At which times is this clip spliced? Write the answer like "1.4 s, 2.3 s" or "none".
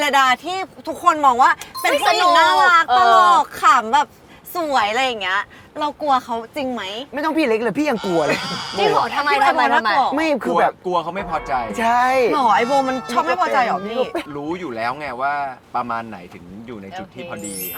none